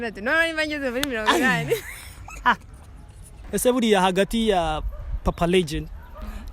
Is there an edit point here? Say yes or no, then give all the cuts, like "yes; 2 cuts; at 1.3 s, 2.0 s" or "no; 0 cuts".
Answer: yes; 1 cut; at 3.3 s